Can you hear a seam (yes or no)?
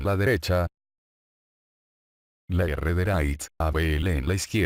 no